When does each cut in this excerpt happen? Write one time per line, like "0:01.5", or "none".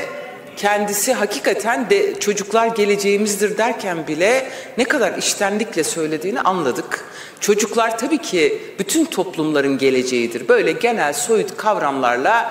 none